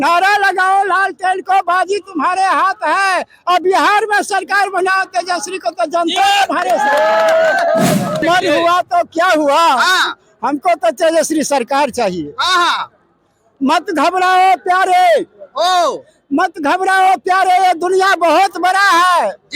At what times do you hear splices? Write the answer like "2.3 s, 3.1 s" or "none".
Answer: 8.2 s